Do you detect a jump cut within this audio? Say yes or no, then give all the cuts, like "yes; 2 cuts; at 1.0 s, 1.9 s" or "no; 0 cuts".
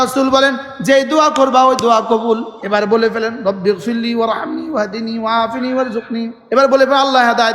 yes; 2 cuts; at 2.5 s, 6.4 s